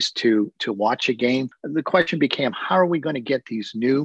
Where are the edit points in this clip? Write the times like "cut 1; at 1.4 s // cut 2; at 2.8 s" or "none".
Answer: cut 1; at 1.6 s